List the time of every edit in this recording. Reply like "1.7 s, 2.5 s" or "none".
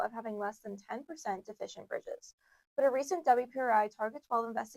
none

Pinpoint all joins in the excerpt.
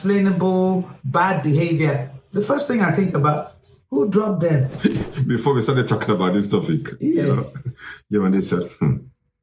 4.7 s

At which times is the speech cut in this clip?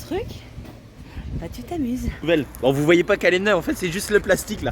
2.2 s

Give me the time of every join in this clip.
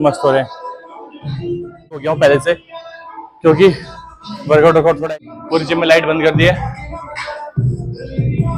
2.0 s, 5.0 s

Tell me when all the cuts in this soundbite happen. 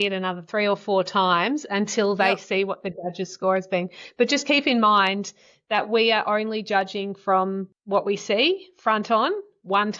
7.7 s

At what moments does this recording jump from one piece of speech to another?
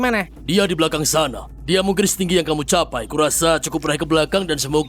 1.5 s, 3.1 s

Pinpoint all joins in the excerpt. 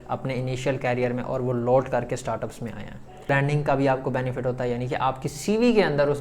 3.3 s

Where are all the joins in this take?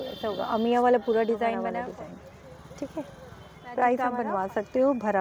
1.6 s, 4.1 s

